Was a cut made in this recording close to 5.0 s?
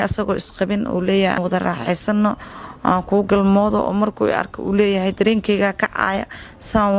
no; 1 cut; at 1.4 s

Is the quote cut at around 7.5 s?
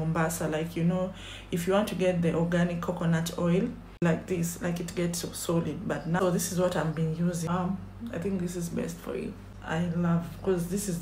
yes; 4 cuts; at 4.0 s, 6.2 s, 7.5 s, 9.5 s

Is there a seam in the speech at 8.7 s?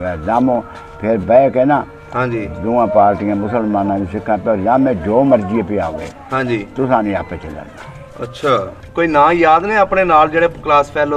yes; 1 cut; at 8.7 s

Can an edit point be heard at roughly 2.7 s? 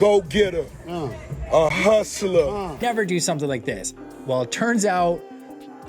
yes; 1 cut; at 2.7 s

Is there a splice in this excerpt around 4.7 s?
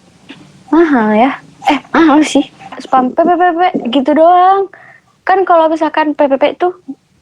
no; 1 cut; at 2.8 s

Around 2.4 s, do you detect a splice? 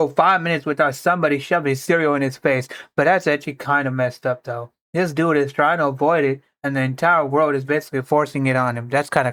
no; 0 cuts

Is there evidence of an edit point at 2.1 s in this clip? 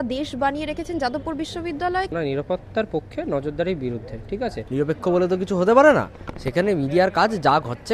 yes; 2 cuts; at 2.1 s, 4.6 s

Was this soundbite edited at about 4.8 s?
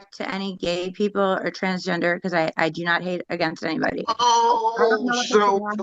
no; 0 cuts

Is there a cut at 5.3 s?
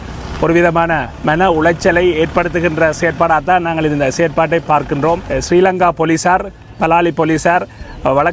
yes; 1 cut; at 5.3 s

